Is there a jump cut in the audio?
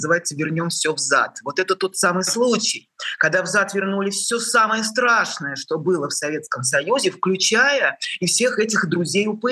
no; 0 cuts

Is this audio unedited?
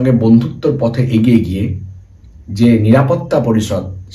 yes; 0 cuts

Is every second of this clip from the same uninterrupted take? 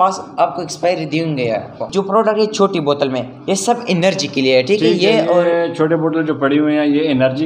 no; 1 cut; at 1.8 s

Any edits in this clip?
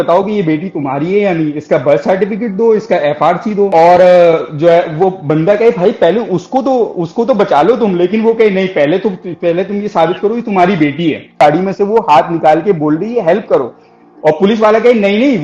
yes; 1 cut; at 11.4 s

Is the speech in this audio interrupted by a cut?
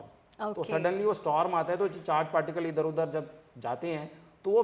no; 0 cuts

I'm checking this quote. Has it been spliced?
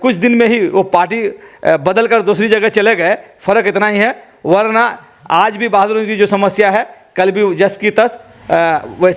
no; 0 cuts

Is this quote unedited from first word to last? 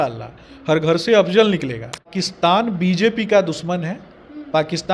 no; 1 cut; at 2.1 s

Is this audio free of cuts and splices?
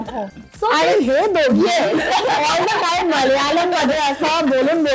yes; 0 cuts

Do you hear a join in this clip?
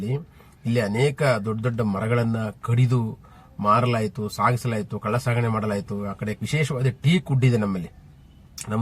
yes; 1 cut; at 6.4 s

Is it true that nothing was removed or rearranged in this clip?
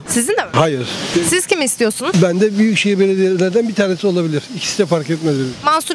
yes; 0 cuts

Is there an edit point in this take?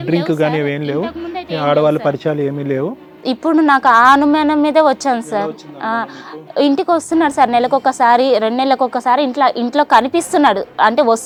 no; 0 cuts

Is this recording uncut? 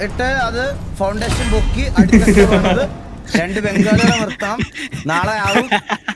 yes; 0 cuts

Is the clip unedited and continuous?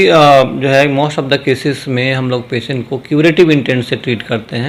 yes; 0 cuts

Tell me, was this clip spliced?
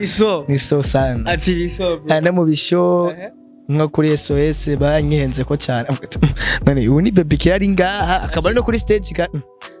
no; 0 cuts

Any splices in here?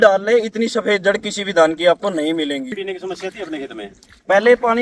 yes; 1 cut; at 2.8 s

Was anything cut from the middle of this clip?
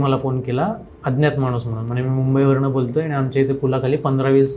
no; 0 cuts

